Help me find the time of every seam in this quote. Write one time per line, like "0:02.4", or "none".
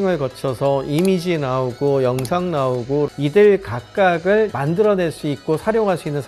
none